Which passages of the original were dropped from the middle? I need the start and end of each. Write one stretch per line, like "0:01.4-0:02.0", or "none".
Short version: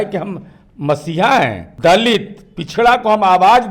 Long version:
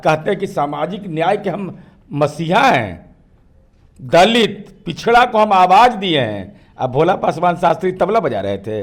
0:03.0-0:03.9

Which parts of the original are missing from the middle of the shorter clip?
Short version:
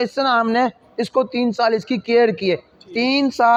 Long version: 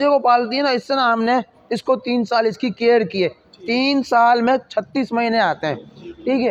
none

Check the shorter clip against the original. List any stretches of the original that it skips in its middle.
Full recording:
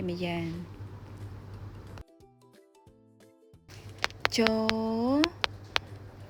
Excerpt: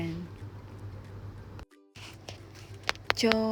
0:02.7-0:03.5

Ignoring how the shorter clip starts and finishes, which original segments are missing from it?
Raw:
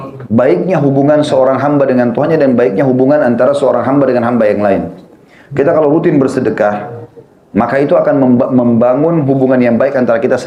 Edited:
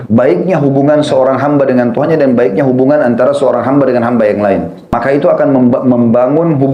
0:05.2-0:07.6

